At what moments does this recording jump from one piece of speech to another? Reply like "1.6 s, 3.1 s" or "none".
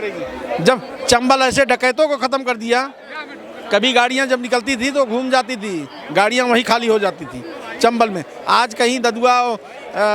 none

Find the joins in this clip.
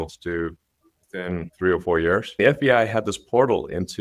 1.5 s, 2.3 s

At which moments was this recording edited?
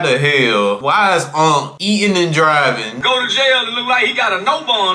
0.8 s, 1.7 s, 2.9 s

